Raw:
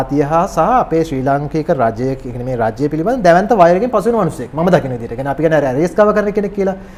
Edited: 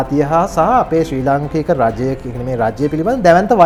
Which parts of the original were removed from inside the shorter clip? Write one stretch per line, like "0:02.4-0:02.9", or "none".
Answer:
none